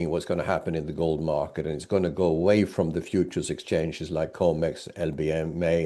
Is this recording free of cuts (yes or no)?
yes